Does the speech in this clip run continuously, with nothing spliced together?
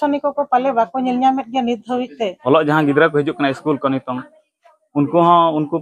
no; 1 cut; at 2.4 s

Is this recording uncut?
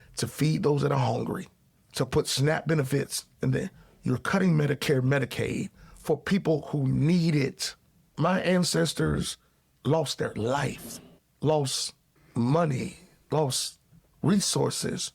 no; 1 cut; at 8.1 s

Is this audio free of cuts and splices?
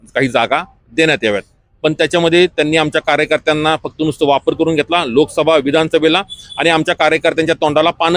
yes; 0 cuts

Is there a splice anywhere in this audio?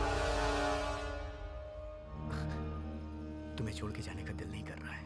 yes; 1 cut; at 2.1 s

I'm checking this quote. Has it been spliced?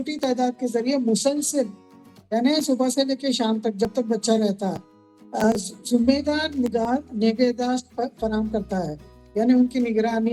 no; 0 cuts

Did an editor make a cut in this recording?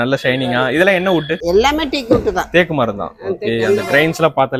no; 0 cuts

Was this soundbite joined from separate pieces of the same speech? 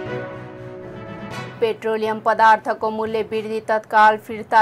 no; 0 cuts

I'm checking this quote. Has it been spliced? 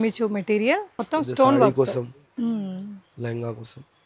yes; 1 cut; at 0.9 s

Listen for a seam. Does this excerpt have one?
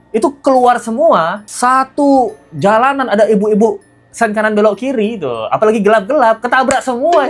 no; 0 cuts

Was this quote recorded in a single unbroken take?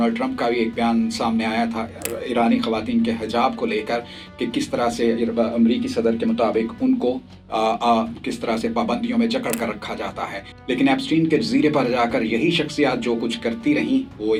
yes; 0 cuts

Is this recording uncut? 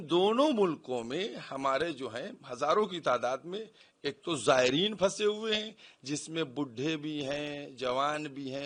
yes; 0 cuts

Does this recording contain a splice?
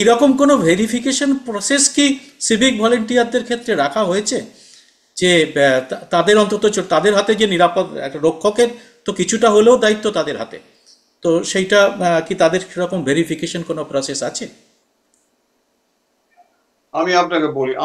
no; 0 cuts

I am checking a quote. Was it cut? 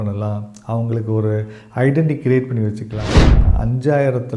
yes; 1 cut; at 3.4 s

